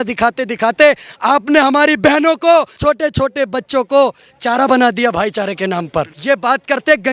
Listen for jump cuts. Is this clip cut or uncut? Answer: cut